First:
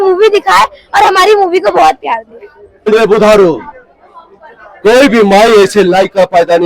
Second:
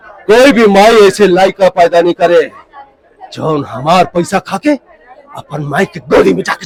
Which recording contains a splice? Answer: first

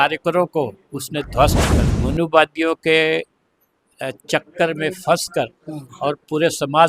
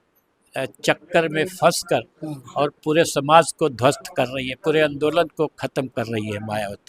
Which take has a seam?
first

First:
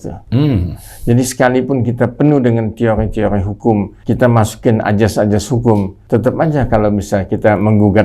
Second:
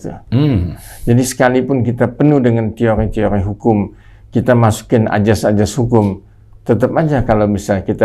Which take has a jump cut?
first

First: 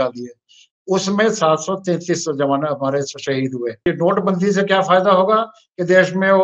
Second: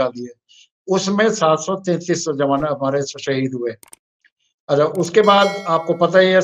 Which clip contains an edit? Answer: first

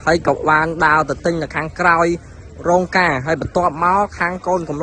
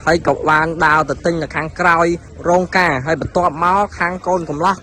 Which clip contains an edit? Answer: second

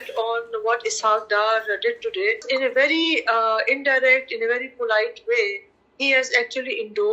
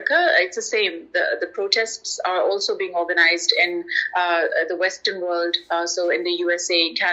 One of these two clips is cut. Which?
first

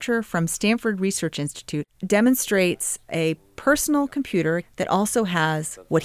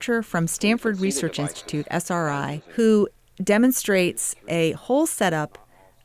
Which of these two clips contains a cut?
first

